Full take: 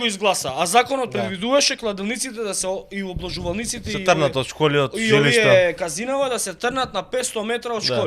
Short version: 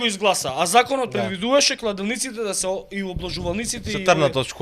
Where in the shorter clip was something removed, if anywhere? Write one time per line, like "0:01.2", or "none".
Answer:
none